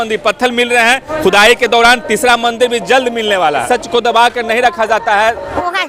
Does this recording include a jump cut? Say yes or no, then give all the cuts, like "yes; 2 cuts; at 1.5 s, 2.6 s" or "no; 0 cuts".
no; 0 cuts